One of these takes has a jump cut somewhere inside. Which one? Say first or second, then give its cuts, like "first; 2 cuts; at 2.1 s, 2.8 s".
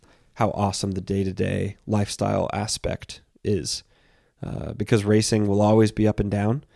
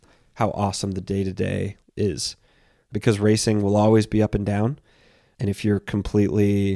second; 3 cuts; at 1.8 s, 2.9 s, 5.2 s